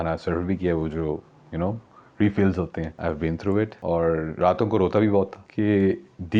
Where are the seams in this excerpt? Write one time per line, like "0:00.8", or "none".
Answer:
0:02.9
0:03.8
0:05.4